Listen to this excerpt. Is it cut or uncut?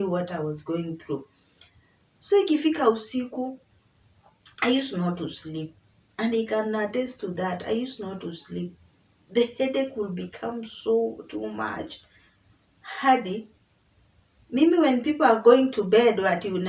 uncut